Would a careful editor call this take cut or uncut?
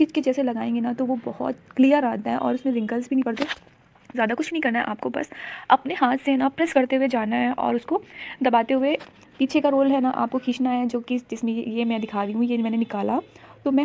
uncut